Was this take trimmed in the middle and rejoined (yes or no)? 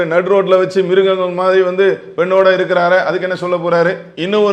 no